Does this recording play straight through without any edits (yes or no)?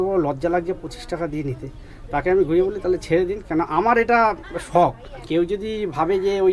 no